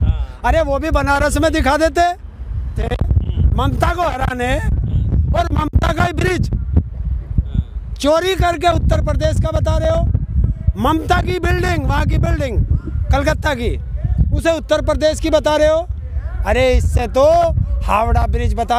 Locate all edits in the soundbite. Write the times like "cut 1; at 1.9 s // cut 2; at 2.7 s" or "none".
cut 1; at 2.8 s